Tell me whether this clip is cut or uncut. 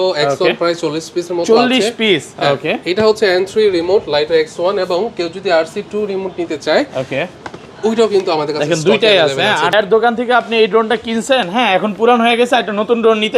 cut